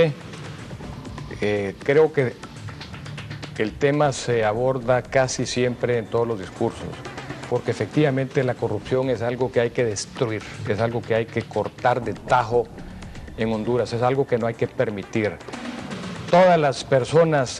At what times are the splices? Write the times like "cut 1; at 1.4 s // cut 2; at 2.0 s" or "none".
cut 1; at 10.9 s

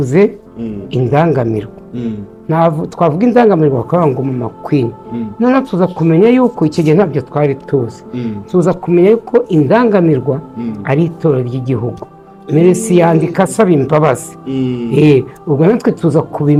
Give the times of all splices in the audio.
none

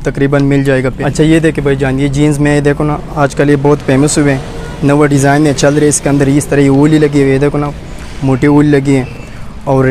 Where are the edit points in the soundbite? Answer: cut 1; at 0.9 s

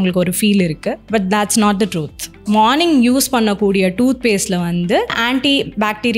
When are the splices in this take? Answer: cut 1; at 1.0 s // cut 2; at 2.4 s // cut 3; at 5.2 s

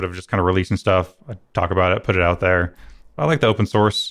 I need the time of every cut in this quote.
cut 1; at 3.2 s

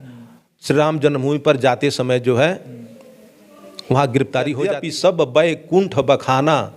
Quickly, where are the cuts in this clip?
cut 1; at 4.6 s

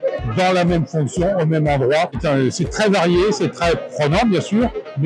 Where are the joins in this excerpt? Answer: none

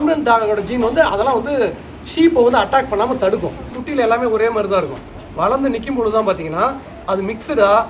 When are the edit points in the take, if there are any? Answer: cut 1; at 3.8 s

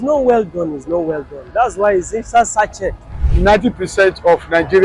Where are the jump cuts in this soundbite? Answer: cut 1; at 3.1 s

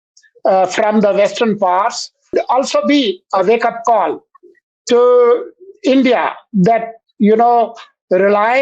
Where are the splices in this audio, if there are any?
cut 1; at 2.3 s

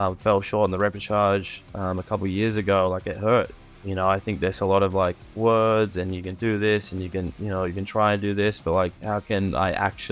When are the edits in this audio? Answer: cut 1; at 3.5 s // cut 2; at 5.2 s

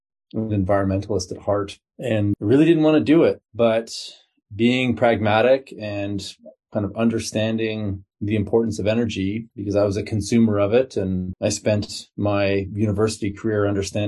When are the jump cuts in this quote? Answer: cut 1; at 3.5 s // cut 2; at 9.5 s // cut 3; at 11.3 s

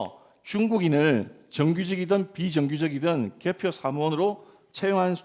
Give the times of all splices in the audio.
none

